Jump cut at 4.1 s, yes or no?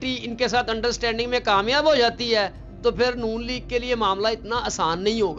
no